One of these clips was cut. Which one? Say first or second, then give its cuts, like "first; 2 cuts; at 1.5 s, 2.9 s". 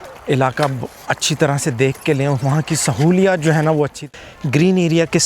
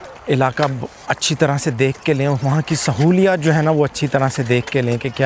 first; 1 cut; at 4.0 s